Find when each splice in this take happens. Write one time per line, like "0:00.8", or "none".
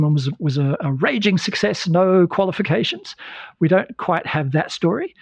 none